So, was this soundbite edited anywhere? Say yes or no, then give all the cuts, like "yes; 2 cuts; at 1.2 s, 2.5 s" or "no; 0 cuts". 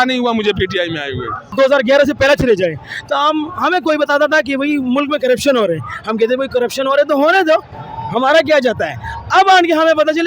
yes; 1 cut; at 1.5 s